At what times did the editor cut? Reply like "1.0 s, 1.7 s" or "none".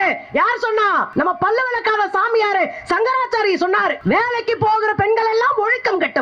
1.1 s, 4.0 s